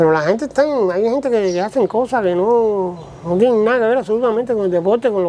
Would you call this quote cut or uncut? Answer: uncut